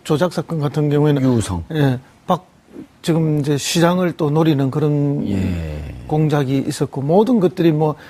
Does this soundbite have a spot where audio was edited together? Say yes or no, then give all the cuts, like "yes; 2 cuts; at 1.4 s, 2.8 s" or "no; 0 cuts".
yes; 1 cut; at 3.2 s